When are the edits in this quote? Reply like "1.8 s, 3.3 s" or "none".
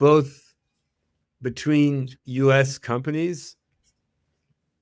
none